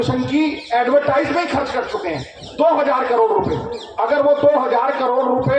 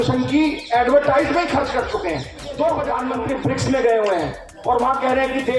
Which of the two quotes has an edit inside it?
second; 1 cut; at 3.1 s

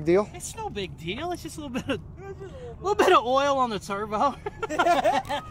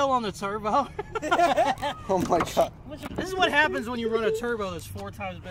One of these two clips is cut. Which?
second; 1 cut; at 3.1 s

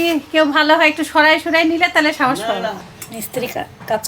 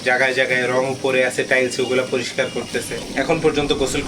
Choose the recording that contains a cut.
first; 1 cut; at 2.8 s

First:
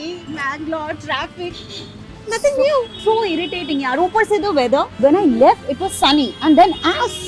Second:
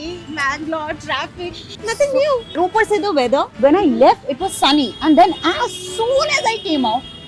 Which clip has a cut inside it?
second; 2 cuts; at 1.7 s, 2.5 s

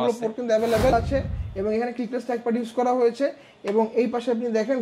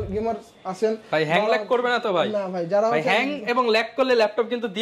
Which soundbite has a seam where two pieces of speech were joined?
first; 1 cut; at 0.9 s

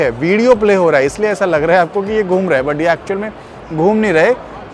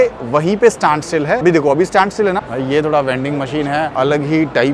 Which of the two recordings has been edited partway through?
second; 3 cuts; at 1.4 s, 2.5 s, 3.9 s

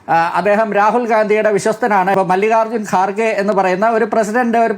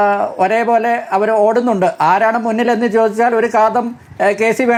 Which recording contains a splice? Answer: first; 1 cut; at 2.1 s

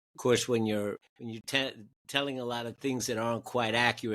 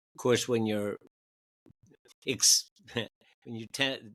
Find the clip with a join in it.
first; 1 cut; at 1.1 s

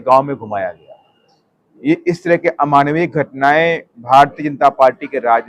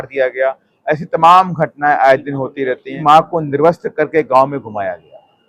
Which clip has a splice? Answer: second; 1 cut; at 2.9 s

